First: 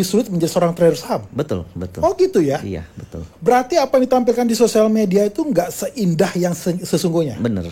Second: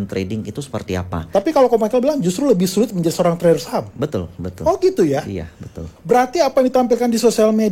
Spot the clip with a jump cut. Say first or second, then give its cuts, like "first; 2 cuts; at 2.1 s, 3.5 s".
second; 1 cut; at 1.2 s